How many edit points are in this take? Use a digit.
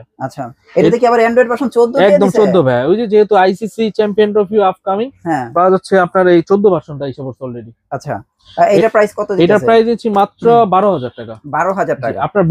0